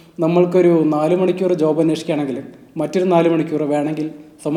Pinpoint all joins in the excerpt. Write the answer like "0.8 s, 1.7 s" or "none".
none